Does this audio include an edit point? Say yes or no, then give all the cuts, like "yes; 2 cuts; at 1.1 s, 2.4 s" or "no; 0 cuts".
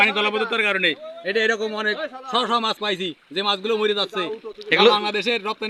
no; 0 cuts